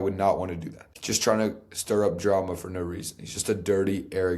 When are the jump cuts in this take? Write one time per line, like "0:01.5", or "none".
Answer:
0:01.0